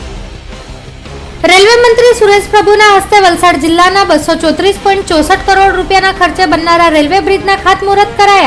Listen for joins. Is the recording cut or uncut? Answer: cut